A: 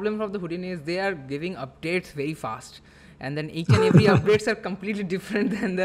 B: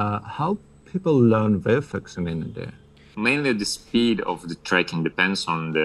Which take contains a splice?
B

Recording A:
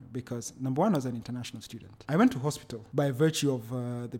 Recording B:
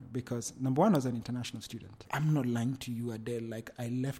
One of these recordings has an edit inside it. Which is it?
B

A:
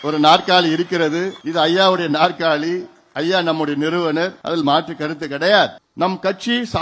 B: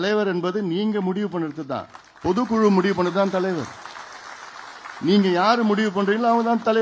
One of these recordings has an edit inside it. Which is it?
A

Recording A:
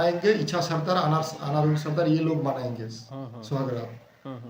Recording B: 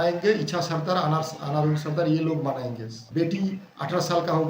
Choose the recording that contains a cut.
B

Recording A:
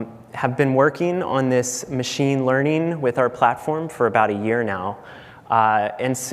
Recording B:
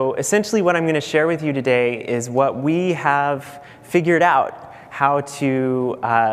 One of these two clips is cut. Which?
A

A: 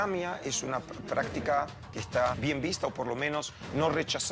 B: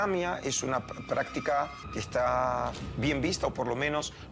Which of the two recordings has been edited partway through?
A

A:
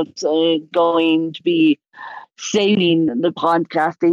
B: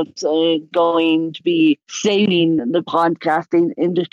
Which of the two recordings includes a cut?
B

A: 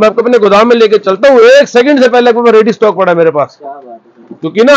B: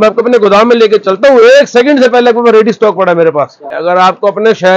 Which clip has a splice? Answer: B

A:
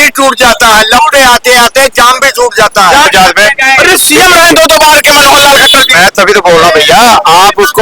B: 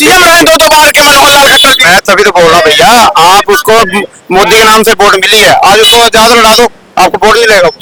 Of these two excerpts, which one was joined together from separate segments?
A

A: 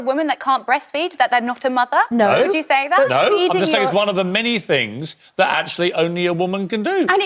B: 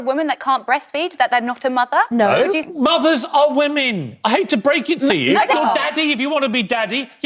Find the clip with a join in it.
B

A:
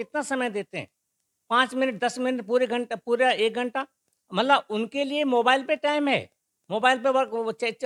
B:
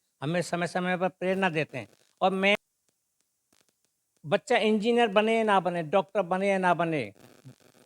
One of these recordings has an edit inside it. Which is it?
B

